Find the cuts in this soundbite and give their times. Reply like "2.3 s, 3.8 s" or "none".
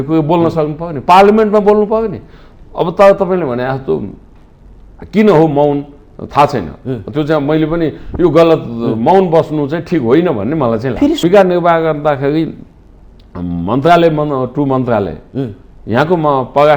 11.2 s

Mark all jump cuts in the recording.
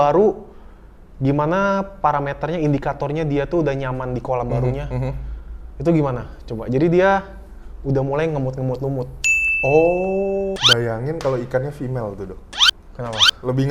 10.5 s

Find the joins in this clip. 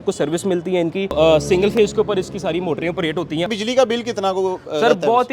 1.1 s, 3.5 s

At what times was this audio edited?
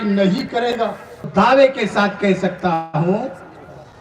1.3 s

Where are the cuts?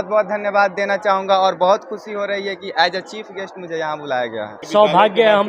4.6 s

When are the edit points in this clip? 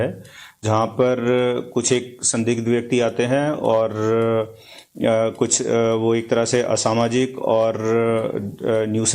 6.8 s

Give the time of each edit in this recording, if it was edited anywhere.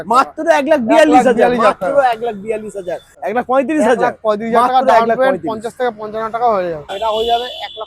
3.1 s, 6.9 s

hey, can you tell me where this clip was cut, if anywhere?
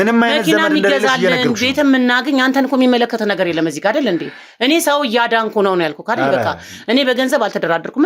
none

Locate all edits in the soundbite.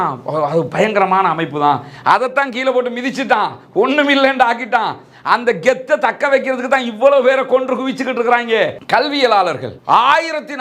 8.8 s

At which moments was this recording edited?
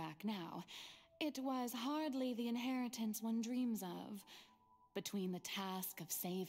none

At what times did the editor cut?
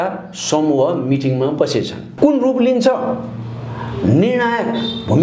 2.0 s

